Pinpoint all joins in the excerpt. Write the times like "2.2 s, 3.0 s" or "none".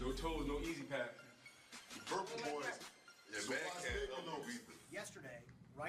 4.8 s